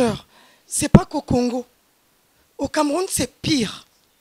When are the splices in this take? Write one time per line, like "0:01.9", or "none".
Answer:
none